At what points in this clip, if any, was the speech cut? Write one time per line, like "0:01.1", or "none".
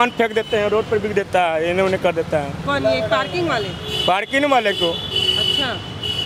none